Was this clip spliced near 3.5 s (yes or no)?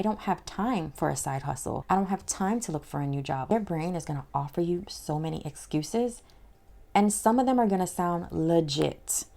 yes